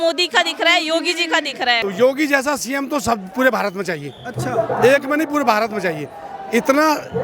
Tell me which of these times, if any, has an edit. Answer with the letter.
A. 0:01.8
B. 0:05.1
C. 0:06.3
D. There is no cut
A